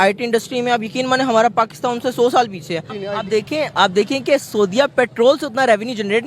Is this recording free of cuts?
no; 1 cut; at 2.9 s

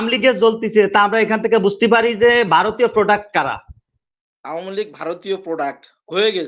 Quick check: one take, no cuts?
no; 1 cut; at 4.0 s

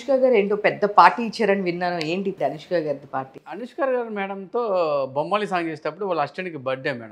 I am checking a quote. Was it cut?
yes; 1 cut; at 2.3 s

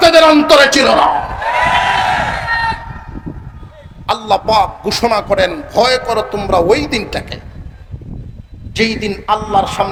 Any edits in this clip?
no; 0 cuts

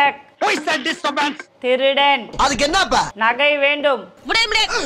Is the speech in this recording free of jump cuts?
yes; 0 cuts

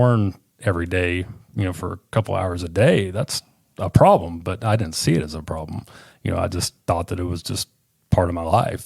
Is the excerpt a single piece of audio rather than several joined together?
yes; 0 cuts

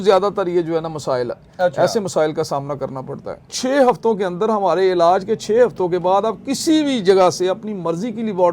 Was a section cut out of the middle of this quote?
yes; 1 cut; at 3.5 s

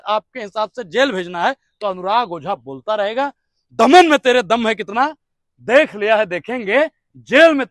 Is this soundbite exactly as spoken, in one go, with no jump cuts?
yes; 0 cuts

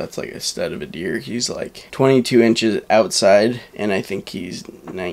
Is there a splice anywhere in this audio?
yes; 2 cuts; at 1.8 s, 3.7 s

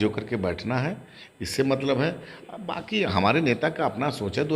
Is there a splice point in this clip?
no; 0 cuts

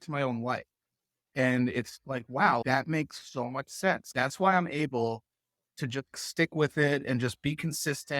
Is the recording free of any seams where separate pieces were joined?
no; 4 cuts; at 1.3 s, 2.6 s, 4.1 s, 6.1 s

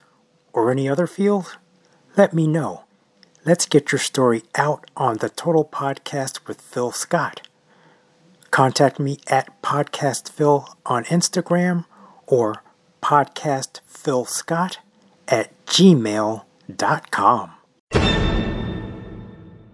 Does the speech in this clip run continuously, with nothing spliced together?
no; 1 cut; at 17.6 s

